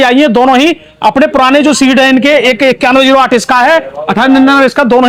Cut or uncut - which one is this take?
uncut